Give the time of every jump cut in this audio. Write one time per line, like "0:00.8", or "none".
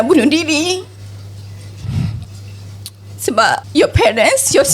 0:03.7

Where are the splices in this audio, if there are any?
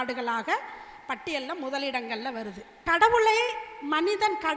0:02.7

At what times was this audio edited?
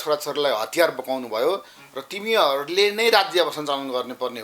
none

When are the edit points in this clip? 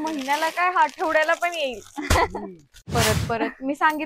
0:02.9

